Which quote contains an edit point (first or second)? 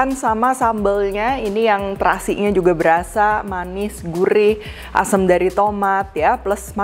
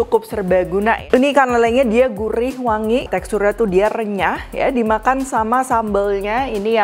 second